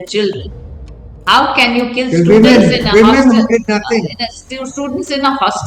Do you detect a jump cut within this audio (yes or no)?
no